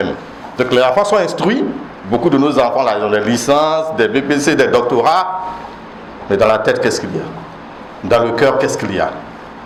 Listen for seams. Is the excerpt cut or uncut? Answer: uncut